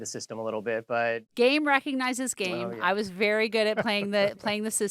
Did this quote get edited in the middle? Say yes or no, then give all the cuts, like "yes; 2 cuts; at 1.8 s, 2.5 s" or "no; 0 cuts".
yes; 1 cut; at 1.3 s